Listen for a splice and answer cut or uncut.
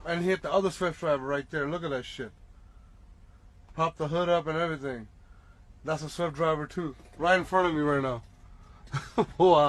uncut